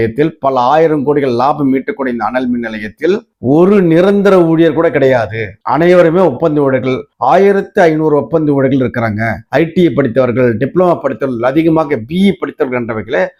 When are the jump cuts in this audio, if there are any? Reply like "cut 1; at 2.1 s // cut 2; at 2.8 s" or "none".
none